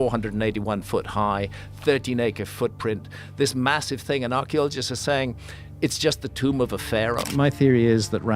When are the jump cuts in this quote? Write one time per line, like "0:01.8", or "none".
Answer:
0:07.3